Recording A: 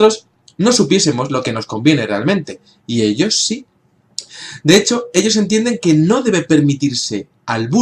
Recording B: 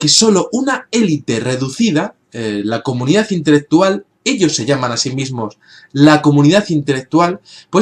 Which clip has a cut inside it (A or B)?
B